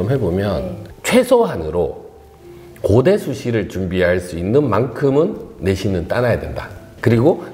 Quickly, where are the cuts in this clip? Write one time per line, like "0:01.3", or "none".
0:00.9